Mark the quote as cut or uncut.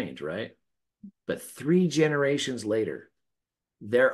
uncut